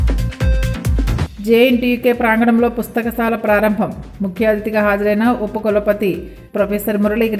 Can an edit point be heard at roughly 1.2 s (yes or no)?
yes